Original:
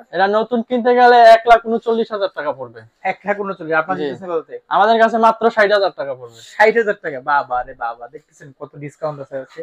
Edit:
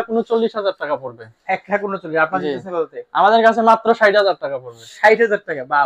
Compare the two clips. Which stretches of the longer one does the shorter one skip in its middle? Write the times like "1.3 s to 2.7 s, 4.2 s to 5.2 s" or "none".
none